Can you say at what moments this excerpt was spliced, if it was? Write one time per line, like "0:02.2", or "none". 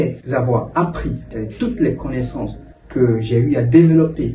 0:01.3